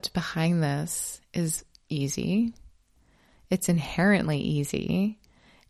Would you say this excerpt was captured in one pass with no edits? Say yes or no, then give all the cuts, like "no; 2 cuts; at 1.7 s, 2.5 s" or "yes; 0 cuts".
yes; 0 cuts